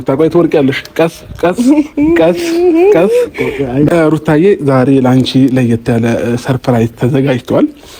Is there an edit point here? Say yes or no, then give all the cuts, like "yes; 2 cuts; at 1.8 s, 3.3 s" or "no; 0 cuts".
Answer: yes; 1 cut; at 3.9 s